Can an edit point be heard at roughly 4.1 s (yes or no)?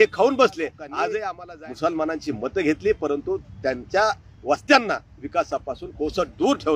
no